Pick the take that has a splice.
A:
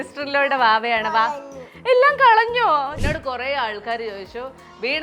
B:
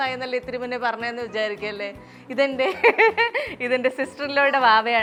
A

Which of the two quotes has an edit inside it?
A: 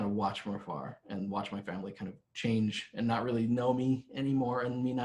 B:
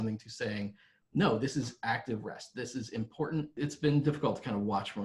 B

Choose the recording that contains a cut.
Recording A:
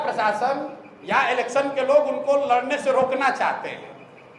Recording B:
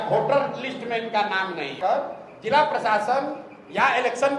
B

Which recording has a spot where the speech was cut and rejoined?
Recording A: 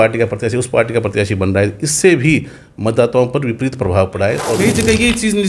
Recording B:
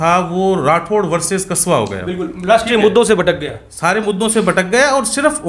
A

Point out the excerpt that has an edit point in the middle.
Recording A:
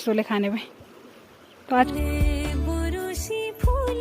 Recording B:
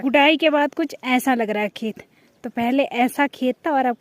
A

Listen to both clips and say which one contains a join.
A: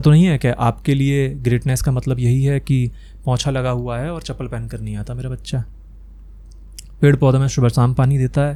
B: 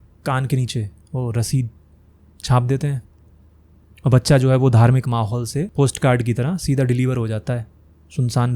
B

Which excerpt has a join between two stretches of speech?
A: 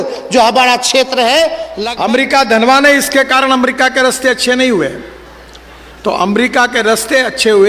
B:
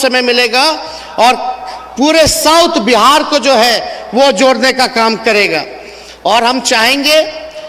A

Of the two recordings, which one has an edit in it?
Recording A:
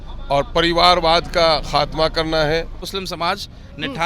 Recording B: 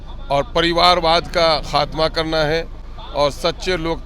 A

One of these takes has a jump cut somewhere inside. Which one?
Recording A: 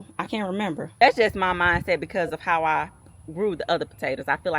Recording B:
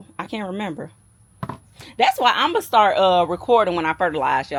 A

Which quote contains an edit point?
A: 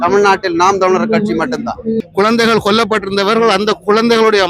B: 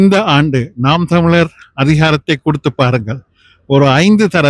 A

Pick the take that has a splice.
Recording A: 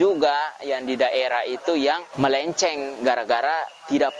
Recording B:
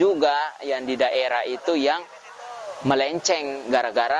A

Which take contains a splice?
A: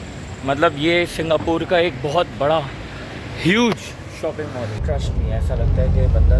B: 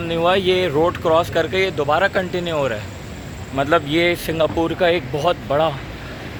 A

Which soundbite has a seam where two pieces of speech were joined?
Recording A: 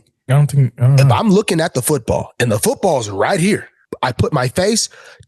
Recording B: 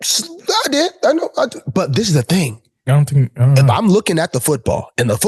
A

